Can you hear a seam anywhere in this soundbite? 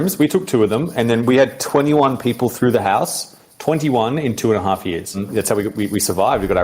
yes; 1 cut; at 5.2 s

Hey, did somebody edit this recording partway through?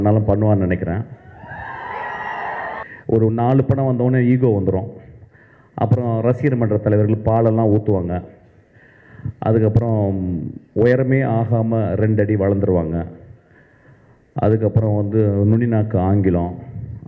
yes; 1 cut; at 2.9 s

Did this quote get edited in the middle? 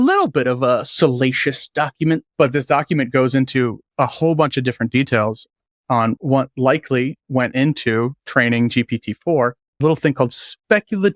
yes; 3 cuts; at 2.3 s, 6.2 s, 9.8 s

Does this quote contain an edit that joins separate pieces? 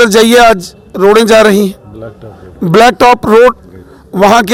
no; 0 cuts

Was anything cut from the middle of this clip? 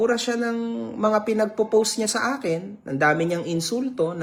no; 0 cuts

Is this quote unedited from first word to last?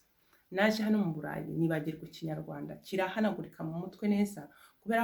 yes; 0 cuts

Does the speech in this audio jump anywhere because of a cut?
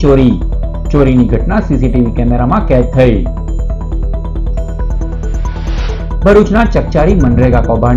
no; 0 cuts

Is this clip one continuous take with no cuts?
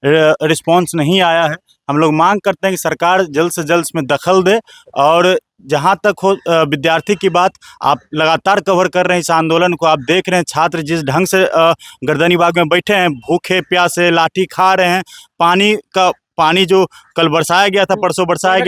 yes; 0 cuts

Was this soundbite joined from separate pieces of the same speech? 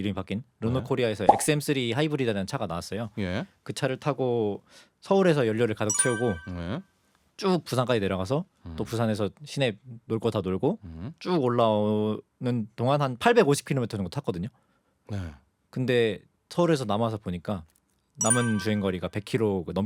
no; 0 cuts

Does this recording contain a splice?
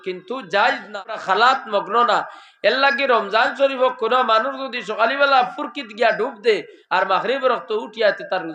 yes; 1 cut; at 1.0 s

